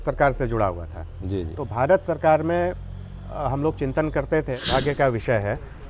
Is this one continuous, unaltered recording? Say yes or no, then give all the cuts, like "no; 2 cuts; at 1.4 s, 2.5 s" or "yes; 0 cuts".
no; 1 cut; at 4.6 s